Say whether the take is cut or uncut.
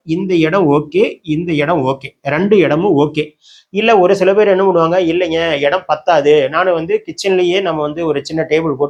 uncut